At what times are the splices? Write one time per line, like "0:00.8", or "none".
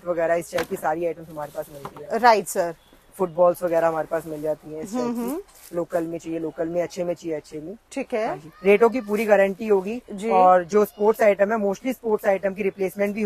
none

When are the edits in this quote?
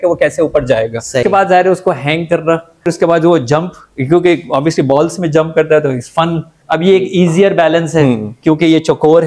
0:01.2
0:02.9
0:06.6

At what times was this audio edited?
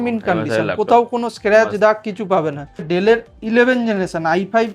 0:02.8

